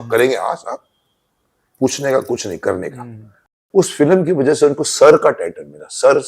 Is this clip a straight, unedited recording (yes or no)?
no